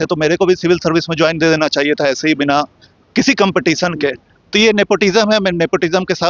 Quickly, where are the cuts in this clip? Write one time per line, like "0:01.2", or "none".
none